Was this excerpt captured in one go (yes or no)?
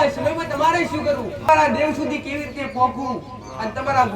no